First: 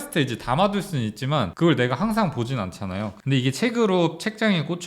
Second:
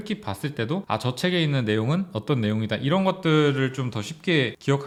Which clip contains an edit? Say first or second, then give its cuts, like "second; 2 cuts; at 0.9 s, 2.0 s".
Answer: first; 2 cuts; at 1.5 s, 3.2 s